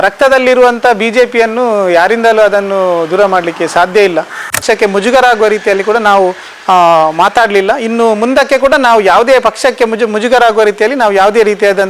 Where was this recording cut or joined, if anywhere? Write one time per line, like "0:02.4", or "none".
0:04.6